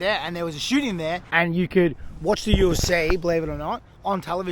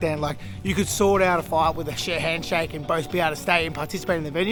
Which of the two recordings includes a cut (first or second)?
first